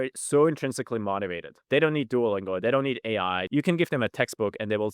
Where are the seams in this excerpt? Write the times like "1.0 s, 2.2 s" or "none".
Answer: 1.6 s, 3.4 s